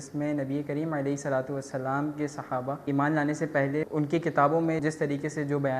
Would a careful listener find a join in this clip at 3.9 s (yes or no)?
yes